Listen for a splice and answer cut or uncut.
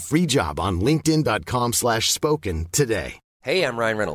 cut